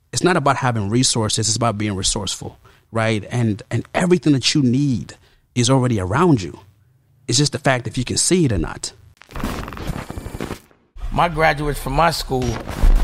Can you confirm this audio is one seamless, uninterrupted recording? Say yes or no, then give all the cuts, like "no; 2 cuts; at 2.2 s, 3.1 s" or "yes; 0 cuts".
no; 1 cut; at 9.1 s